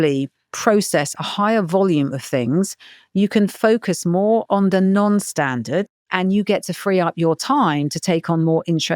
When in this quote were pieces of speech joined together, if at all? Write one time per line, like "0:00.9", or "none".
0:05.9